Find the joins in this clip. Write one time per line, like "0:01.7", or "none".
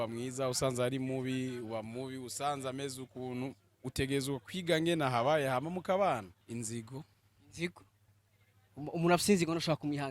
0:06.4